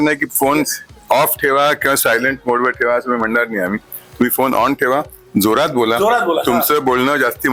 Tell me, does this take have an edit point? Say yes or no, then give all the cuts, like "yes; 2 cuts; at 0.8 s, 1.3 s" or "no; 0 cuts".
no; 0 cuts